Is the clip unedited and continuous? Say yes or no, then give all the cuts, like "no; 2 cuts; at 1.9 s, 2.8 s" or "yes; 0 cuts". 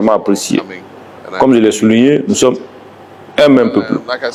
yes; 0 cuts